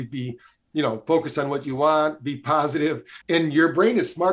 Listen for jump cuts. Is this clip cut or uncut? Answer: cut